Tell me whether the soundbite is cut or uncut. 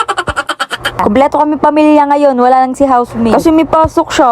cut